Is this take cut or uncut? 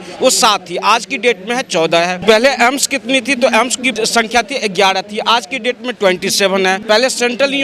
cut